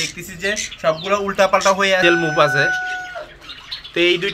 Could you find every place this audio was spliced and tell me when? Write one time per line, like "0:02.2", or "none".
0:02.0